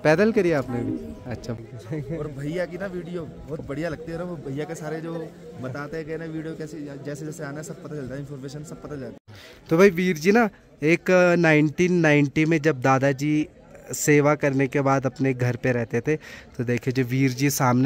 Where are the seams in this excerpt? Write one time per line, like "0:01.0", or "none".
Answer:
0:01.5
0:09.3